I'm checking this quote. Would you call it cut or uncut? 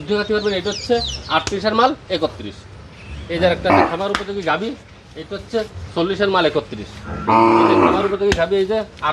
uncut